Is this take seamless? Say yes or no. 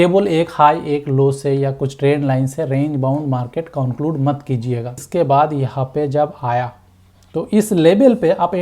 no